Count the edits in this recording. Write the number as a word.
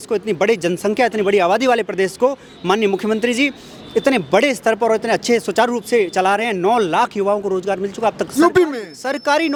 zero